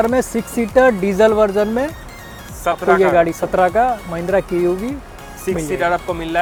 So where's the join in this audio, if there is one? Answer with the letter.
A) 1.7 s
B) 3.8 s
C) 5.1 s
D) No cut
D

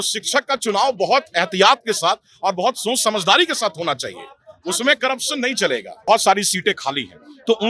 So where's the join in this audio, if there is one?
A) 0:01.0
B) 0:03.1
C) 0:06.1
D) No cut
C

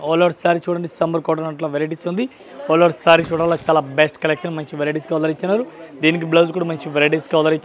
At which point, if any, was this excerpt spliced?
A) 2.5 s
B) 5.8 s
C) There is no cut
A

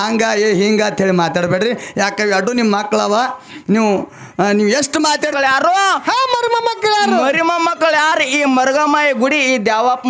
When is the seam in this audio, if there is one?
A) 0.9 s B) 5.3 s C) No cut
B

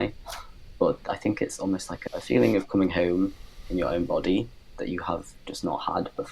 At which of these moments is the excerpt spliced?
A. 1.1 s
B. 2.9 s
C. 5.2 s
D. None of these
A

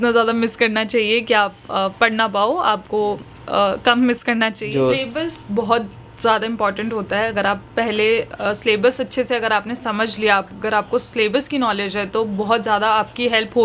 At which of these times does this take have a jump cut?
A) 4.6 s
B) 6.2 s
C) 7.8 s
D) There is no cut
A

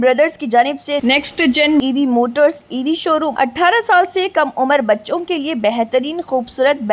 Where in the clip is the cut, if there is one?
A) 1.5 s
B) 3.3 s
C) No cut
B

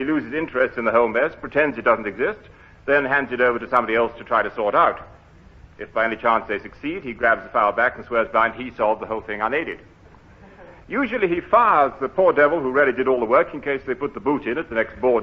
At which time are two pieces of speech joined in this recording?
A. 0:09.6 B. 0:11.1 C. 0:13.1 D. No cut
B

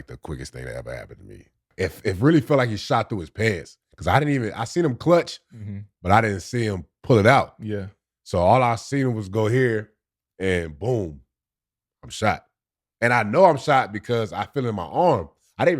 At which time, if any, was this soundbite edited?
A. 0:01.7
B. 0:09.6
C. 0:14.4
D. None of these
A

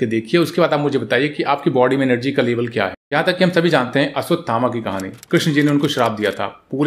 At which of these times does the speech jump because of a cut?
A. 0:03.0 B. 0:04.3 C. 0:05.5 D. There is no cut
A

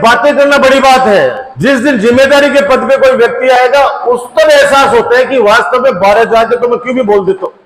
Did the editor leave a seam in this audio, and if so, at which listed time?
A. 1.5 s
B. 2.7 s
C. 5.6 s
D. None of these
A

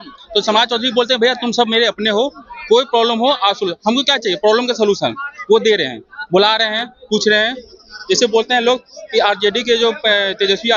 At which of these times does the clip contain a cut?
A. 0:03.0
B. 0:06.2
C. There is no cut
C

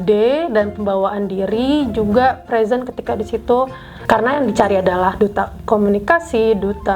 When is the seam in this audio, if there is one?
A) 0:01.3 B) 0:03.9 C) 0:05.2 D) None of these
B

